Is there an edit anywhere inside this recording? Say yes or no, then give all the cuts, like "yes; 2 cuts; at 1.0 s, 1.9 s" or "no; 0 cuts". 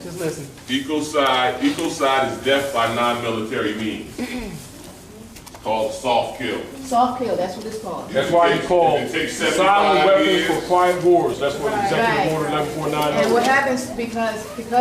no; 0 cuts